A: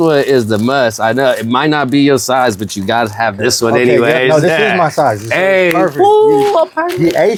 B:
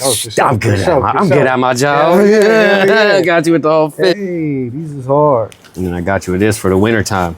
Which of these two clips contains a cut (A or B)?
B